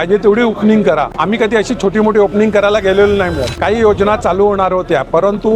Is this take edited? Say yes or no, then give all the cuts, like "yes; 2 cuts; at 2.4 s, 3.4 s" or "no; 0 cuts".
yes; 2 cuts; at 1.1 s, 3.5 s